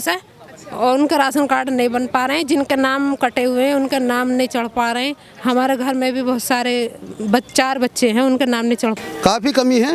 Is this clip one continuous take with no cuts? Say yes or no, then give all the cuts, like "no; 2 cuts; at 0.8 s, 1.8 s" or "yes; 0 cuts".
no; 1 cut; at 9.0 s